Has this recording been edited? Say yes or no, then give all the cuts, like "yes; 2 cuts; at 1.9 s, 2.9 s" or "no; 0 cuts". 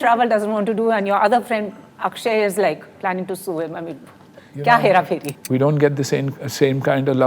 yes; 1 cut; at 5.3 s